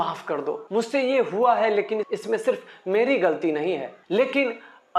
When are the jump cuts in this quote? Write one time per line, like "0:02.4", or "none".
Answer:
none

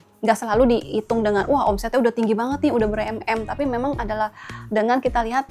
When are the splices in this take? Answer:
none

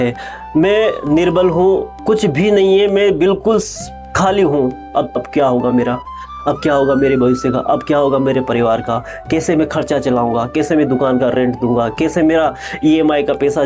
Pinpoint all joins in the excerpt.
0:01.9
0:05.2

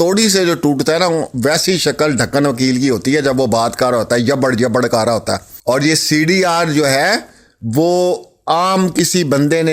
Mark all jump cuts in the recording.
0:05.5

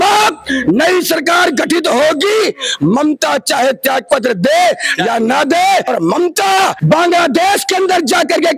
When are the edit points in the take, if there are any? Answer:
0:05.9
0:06.8

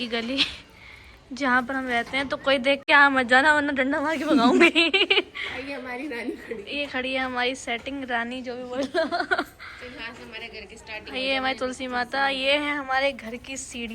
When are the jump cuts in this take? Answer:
none

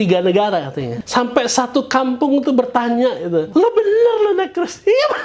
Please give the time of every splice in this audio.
0:00.9
0:03.5

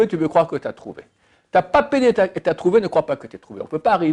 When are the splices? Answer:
none

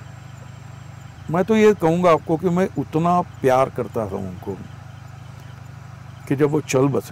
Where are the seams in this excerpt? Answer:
0:01.1

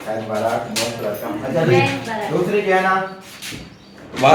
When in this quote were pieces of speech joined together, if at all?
none

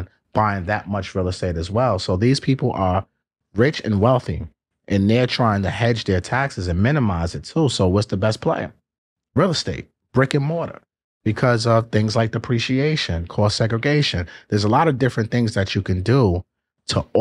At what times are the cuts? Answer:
none

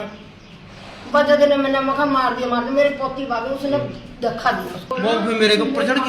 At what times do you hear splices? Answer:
0:04.9

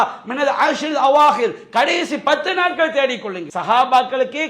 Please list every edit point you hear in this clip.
0:03.4

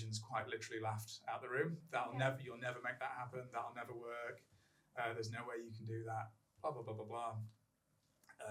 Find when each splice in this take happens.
none

